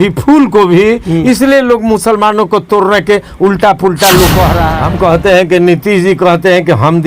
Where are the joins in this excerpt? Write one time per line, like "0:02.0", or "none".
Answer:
0:04.6